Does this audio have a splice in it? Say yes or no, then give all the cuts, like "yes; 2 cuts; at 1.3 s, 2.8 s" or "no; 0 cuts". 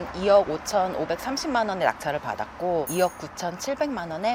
no; 0 cuts